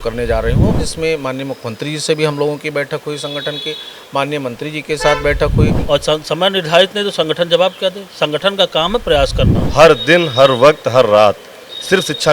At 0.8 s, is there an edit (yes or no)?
yes